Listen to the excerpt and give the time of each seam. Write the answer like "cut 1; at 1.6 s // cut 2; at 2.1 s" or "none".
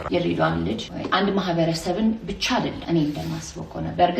cut 1; at 0.9 s // cut 2; at 2.8 s